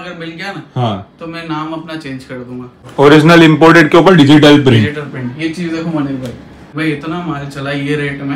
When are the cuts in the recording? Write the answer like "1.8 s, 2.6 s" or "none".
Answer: 2.8 s, 6.8 s

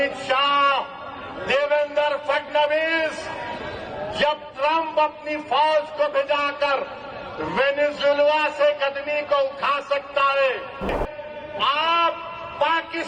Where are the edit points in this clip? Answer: 11.0 s

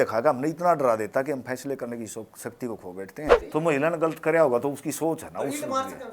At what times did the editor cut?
3.3 s

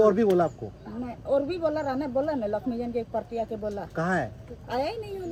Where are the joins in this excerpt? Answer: none

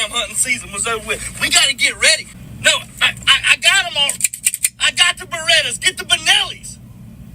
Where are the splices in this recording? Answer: 2.4 s

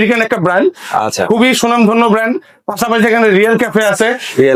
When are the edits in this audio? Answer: none

